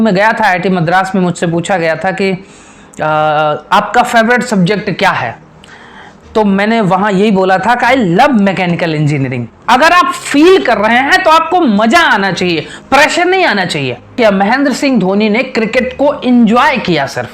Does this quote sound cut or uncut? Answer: cut